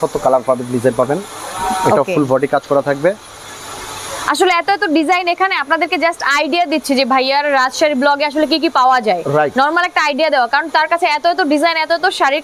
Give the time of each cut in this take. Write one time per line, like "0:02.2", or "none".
none